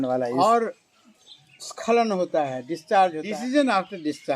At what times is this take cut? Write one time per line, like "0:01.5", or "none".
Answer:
0:03.3